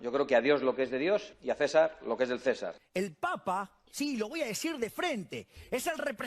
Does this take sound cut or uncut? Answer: cut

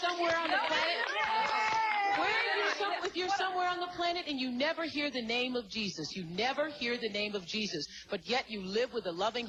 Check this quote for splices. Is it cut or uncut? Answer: uncut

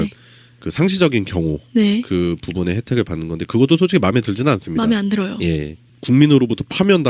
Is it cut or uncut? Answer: uncut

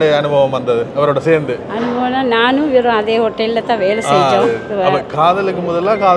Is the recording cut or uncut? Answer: uncut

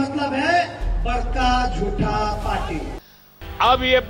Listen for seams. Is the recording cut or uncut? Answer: cut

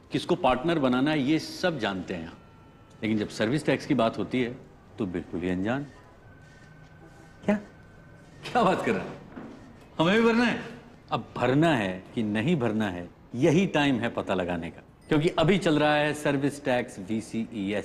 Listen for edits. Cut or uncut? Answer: uncut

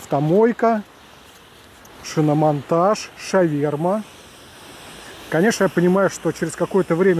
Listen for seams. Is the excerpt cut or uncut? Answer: uncut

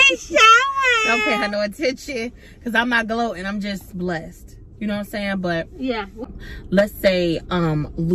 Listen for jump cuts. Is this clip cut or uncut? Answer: cut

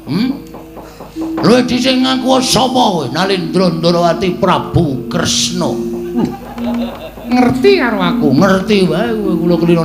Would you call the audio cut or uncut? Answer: uncut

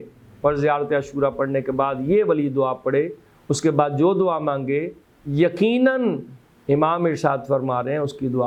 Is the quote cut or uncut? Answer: uncut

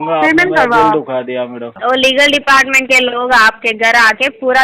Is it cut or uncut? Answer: cut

